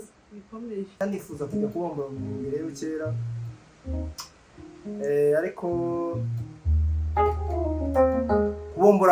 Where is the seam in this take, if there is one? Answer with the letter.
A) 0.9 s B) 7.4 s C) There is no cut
A